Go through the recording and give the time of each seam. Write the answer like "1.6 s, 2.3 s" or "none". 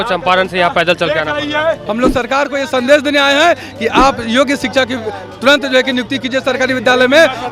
1.9 s